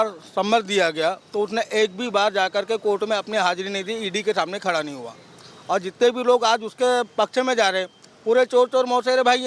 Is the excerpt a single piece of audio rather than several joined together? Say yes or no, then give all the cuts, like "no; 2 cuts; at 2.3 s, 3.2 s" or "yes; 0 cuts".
yes; 0 cuts